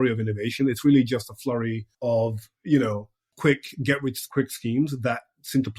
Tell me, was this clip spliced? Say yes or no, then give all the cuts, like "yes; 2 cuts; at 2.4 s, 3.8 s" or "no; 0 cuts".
yes; 3 cuts; at 1.9 s, 3.3 s, 4.2 s